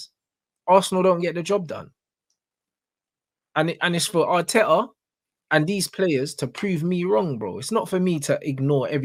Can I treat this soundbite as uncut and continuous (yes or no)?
yes